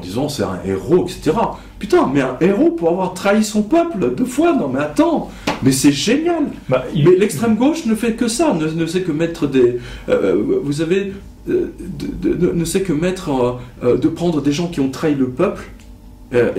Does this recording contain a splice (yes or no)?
no